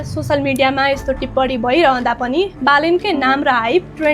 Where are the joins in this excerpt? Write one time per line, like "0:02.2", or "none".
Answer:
none